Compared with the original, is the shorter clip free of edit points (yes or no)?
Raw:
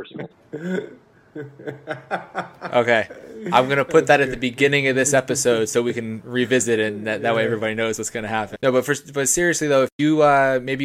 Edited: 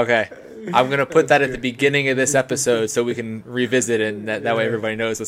yes